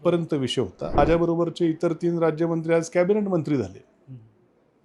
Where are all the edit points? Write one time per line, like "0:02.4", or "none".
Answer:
0:01.0